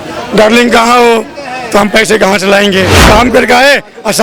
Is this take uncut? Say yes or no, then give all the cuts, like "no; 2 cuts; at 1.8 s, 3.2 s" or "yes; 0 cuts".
no; 1 cut; at 3.0 s